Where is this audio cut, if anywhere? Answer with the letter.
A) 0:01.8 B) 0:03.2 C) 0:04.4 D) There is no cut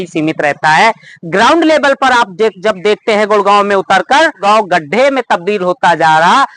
C